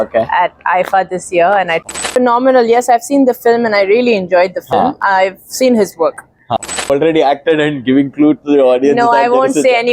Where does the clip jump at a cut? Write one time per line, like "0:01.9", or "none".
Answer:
0:01.9
0:06.8